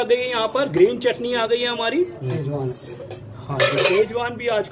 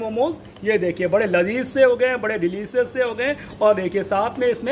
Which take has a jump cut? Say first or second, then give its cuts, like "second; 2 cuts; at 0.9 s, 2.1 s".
first; 1 cut; at 2.3 s